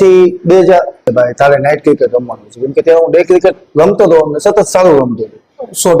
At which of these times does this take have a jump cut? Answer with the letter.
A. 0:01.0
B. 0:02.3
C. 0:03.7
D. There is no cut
A